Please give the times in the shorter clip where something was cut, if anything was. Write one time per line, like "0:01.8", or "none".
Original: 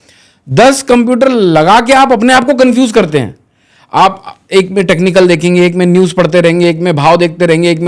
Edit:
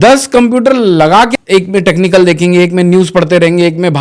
0:01.3